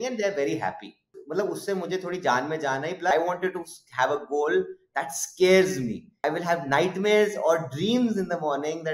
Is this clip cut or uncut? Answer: cut